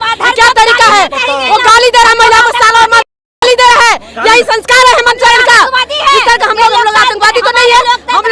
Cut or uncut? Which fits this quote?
uncut